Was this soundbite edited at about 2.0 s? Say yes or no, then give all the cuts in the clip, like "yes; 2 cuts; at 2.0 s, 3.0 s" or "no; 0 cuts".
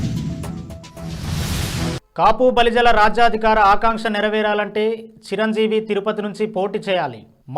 yes; 1 cut; at 2.0 s